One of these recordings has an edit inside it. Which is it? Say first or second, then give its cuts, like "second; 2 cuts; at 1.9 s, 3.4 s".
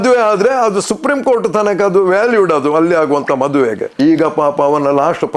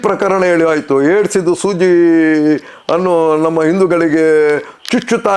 first; 1 cut; at 3.9 s